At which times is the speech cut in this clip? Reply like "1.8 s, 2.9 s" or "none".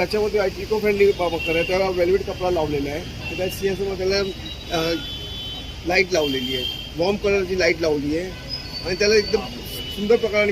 none